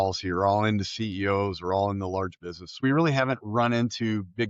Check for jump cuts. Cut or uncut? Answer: cut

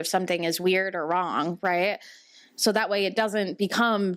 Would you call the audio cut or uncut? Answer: uncut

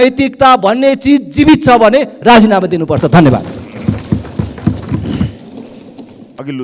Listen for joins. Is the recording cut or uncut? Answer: uncut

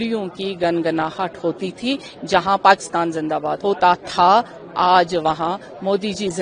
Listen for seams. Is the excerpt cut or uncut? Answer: cut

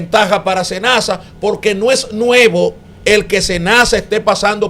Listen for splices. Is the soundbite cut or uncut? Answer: cut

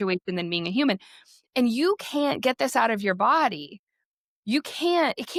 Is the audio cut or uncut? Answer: uncut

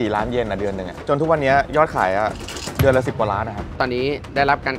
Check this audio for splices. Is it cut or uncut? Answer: cut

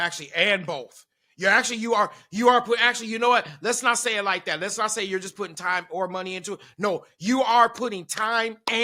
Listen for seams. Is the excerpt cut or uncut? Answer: uncut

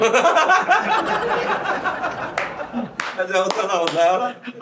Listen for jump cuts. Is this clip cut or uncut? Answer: uncut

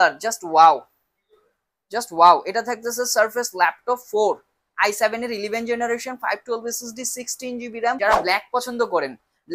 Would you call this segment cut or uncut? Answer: cut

